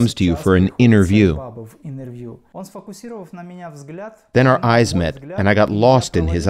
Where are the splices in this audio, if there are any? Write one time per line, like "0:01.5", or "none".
0:02.4